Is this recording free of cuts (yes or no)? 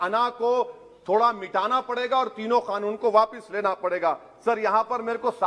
yes